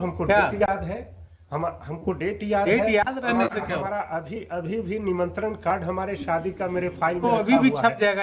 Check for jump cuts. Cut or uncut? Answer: uncut